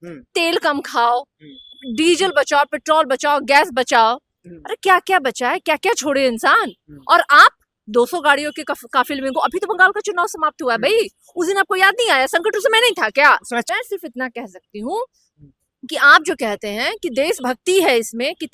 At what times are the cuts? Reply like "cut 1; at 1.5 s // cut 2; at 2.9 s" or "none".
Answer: cut 1; at 13.7 s